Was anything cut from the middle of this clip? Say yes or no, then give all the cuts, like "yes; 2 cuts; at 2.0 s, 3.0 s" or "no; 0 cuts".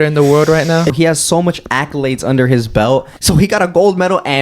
yes; 2 cuts; at 0.9 s, 3.1 s